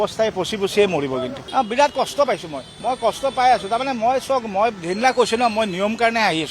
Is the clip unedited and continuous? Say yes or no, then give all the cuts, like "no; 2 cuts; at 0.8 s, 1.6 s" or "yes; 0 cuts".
yes; 0 cuts